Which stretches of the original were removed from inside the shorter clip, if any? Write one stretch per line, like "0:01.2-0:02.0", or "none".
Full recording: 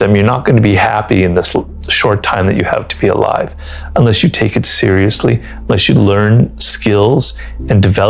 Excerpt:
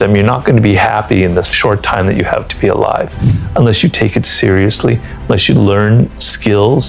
0:01.5-0:01.9

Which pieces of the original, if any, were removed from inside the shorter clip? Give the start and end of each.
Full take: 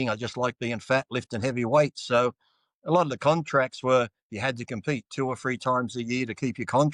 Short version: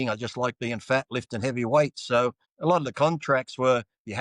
0:02.5-0:02.7

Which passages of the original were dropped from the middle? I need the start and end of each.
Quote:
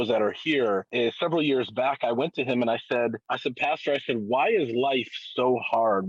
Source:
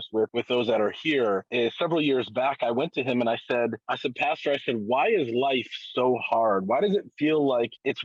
none

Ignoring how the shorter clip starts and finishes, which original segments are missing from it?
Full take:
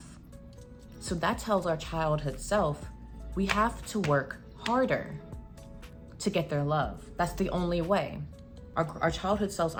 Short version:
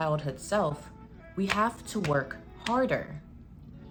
none

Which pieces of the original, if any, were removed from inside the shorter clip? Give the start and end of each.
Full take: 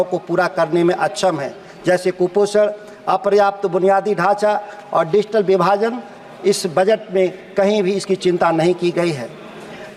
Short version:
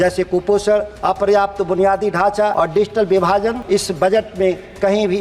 0:02.8-0:03.0
0:04.6-0:04.9
0:06.0-0:06.3

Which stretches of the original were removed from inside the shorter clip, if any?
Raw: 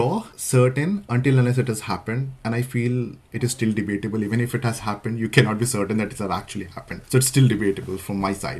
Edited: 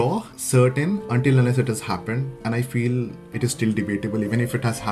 none

